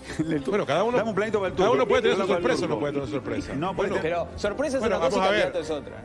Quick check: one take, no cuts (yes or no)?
yes